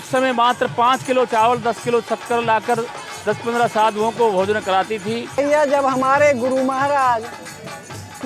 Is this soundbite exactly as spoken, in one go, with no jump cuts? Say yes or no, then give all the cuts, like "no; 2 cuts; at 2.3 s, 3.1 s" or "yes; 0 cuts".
no; 1 cut; at 5.4 s